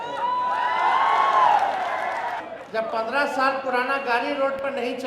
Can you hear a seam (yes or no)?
yes